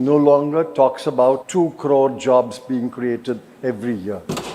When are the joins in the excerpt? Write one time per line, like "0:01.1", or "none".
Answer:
0:01.4